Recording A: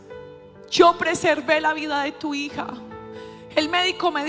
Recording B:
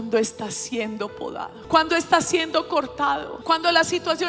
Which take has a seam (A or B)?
B